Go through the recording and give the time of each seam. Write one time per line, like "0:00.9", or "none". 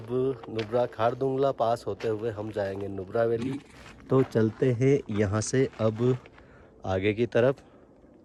none